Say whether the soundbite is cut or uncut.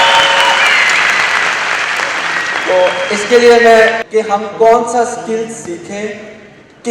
cut